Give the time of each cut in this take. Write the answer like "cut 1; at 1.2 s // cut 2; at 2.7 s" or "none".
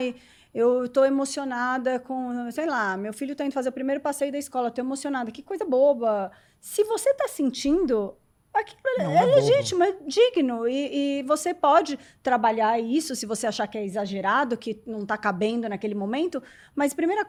none